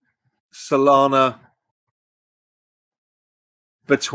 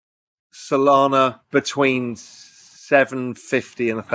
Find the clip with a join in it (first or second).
second